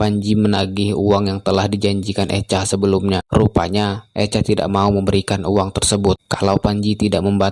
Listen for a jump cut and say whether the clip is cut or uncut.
uncut